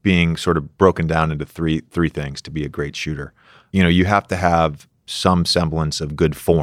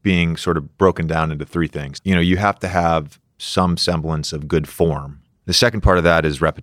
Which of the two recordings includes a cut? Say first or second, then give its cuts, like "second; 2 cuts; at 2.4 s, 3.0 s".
second; 1 cut; at 1.6 s